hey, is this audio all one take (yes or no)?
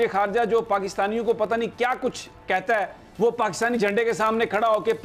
yes